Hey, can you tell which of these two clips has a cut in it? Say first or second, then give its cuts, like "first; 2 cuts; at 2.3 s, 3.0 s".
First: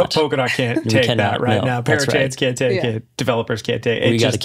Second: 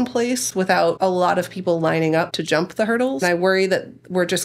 second; 2 cuts; at 1.0 s, 2.9 s